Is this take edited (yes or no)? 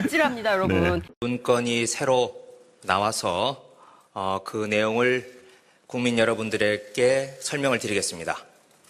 yes